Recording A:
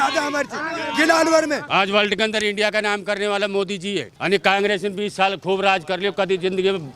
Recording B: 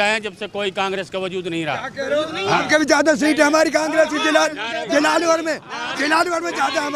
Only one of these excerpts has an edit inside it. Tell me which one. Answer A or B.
A